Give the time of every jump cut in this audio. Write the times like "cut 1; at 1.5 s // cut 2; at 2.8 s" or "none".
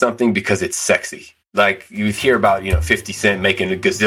none